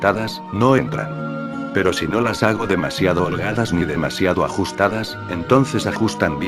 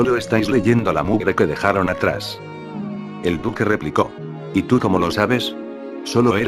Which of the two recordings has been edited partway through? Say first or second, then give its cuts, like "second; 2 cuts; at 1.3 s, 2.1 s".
first; 1 cut; at 2.8 s